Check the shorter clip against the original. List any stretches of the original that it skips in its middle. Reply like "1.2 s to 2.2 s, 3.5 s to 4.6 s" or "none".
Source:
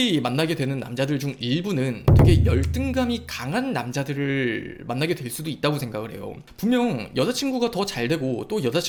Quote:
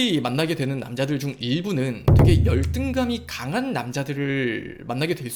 none